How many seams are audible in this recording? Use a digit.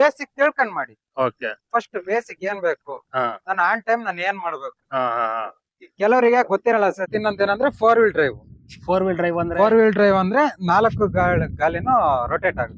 1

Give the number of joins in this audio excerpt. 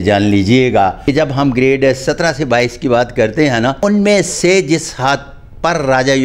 2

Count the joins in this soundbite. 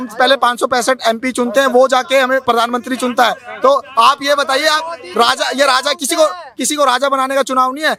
0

